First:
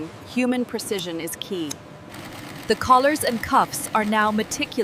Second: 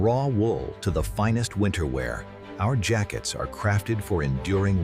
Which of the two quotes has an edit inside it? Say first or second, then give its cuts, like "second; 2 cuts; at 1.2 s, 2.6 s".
first; 1 cut; at 2.1 s